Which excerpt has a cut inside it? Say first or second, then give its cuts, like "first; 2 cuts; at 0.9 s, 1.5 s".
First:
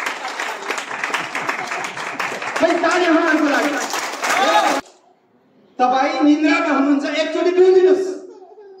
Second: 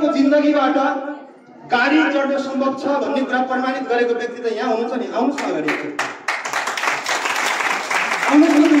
first; 1 cut; at 4.8 s